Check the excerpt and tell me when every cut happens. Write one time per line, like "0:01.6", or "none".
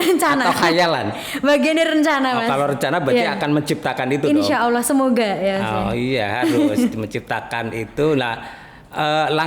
none